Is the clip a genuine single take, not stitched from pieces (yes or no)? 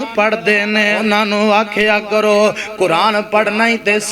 no